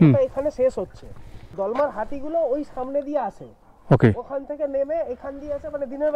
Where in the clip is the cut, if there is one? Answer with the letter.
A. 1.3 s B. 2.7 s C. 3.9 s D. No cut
A